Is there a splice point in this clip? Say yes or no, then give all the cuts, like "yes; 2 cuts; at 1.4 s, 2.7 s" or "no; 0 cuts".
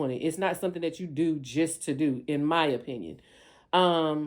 no; 0 cuts